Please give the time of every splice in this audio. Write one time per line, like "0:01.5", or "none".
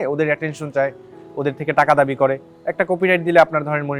none